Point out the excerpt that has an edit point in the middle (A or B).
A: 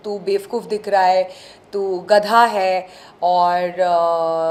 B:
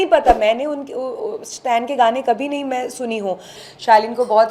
B